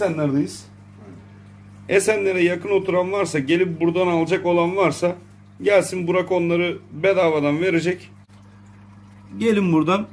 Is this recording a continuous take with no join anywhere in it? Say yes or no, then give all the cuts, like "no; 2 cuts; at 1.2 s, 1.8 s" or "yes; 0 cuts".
no; 1 cut; at 8.3 s